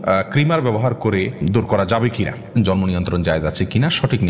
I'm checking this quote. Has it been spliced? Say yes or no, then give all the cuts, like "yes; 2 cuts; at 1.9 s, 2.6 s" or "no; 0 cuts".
yes; 2 cuts; at 1.4 s, 2.6 s